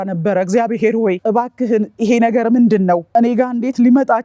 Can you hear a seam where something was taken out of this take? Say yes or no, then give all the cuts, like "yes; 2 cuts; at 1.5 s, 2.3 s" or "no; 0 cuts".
yes; 2 cuts; at 1.2 s, 3.0 s